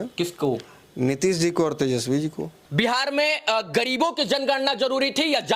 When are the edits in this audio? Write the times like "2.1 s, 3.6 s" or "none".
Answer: 2.6 s